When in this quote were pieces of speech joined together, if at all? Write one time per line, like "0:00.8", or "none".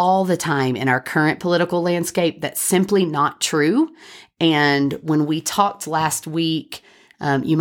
none